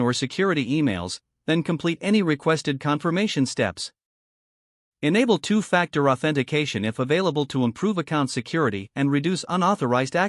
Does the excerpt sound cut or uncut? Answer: uncut